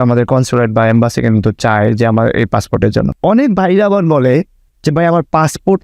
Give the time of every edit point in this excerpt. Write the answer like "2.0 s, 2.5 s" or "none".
3.1 s

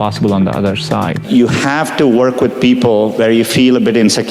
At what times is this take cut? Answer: 1.2 s

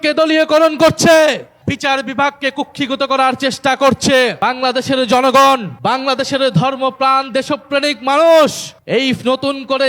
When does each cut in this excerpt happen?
1.5 s, 4.4 s, 5.7 s, 8.7 s

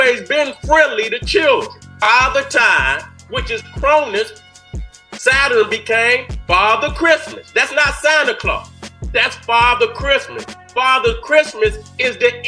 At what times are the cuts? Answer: 1.9 s

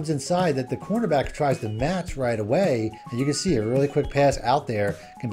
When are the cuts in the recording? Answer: 3.0 s

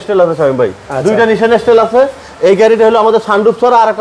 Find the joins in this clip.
none

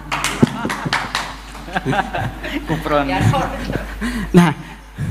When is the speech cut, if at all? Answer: none

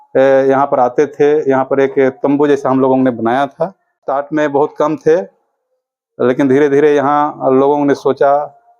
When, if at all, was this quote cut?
4.0 s

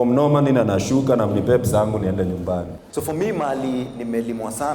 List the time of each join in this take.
2.8 s

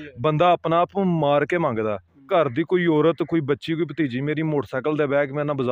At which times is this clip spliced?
2.3 s

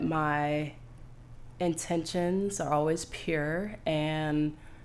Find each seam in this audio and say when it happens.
none

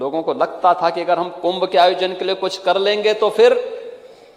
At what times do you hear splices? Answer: none

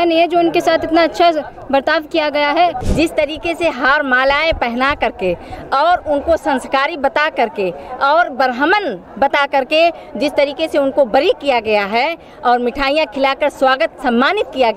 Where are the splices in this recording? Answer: 2.8 s

